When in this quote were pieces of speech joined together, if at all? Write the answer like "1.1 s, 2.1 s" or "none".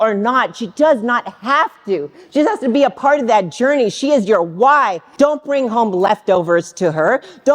5.0 s